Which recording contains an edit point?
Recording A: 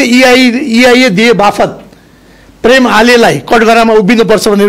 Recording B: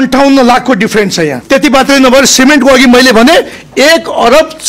B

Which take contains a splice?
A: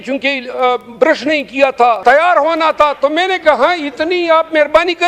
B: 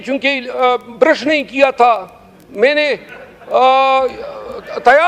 A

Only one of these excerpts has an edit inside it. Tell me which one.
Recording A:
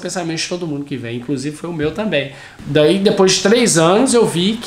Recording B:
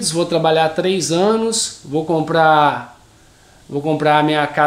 A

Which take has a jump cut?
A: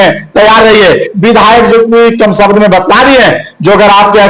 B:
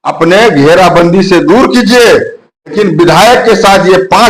B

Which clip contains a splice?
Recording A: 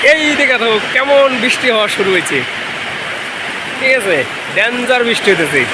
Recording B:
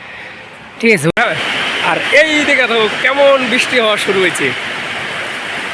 B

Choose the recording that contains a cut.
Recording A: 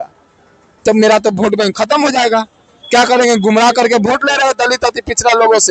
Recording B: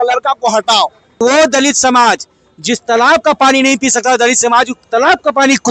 B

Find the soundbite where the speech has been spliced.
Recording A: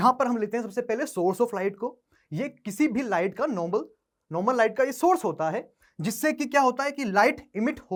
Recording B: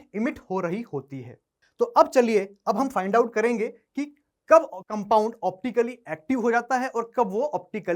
B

